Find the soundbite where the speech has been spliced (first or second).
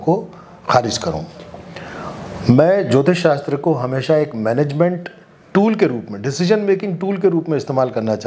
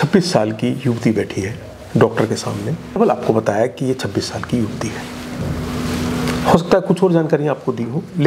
second